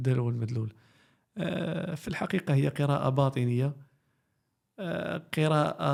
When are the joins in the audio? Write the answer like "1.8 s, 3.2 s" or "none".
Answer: none